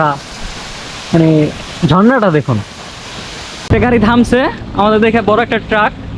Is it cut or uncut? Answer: cut